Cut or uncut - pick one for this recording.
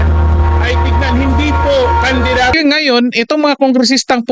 cut